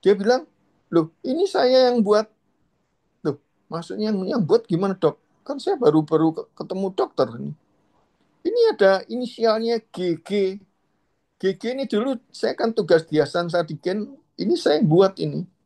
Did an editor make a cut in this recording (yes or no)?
no